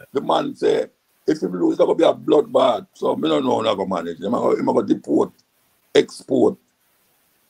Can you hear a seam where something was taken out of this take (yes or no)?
yes